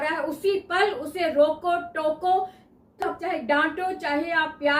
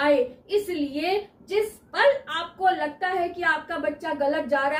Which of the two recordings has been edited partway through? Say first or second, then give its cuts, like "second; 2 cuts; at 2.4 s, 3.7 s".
first; 1 cut; at 3.1 s